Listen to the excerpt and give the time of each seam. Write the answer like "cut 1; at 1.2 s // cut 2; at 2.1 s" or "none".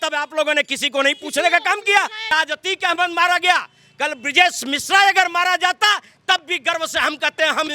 cut 1; at 2.3 s